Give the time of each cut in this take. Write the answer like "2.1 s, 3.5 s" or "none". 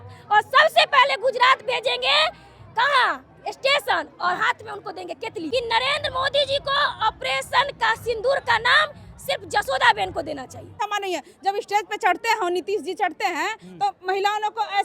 5.4 s, 10.8 s